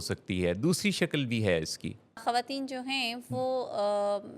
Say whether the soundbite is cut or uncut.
cut